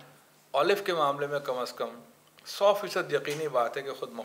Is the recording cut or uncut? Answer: uncut